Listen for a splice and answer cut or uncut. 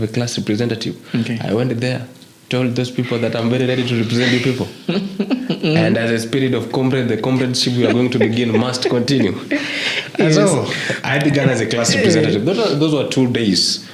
uncut